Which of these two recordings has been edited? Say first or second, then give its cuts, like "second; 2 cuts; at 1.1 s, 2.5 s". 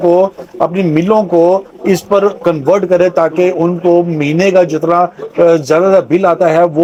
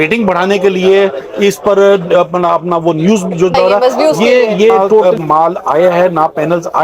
second; 2 cuts; at 3.5 s, 5.0 s